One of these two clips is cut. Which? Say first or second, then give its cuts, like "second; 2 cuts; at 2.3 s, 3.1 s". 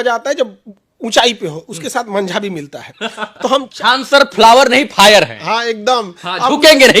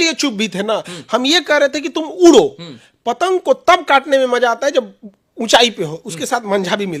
first; 1 cut; at 3.7 s